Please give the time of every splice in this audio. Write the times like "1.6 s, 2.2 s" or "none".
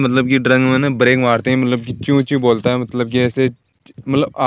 none